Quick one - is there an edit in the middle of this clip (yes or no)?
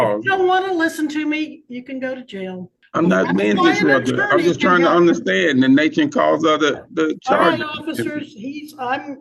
yes